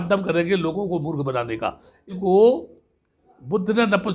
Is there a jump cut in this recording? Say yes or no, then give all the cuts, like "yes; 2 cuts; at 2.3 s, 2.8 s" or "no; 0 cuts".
yes; 1 cut; at 2.1 s